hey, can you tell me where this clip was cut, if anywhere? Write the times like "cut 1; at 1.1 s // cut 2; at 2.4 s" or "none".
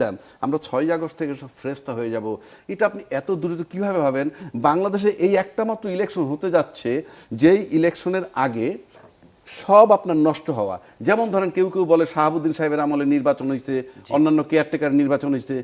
none